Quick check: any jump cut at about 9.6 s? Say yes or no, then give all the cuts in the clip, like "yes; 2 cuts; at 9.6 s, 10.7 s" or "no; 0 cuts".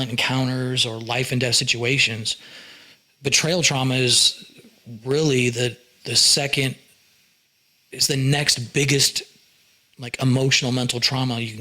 no; 0 cuts